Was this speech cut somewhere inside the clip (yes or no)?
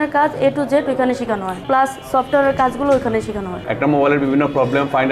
yes